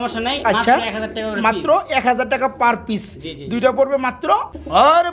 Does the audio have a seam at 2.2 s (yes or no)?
no